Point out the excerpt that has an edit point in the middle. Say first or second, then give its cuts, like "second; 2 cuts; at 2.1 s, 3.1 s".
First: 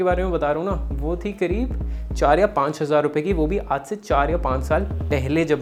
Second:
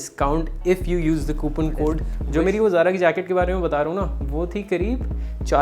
second; 1 cut; at 2.1 s